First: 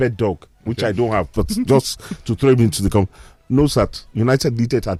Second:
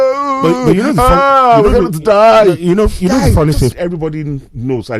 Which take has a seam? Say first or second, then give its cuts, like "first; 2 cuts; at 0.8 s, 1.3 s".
second; 1 cut; at 3.7 s